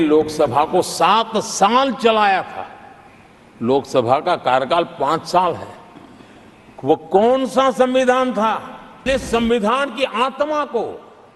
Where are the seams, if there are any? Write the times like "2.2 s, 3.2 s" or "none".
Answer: 9.0 s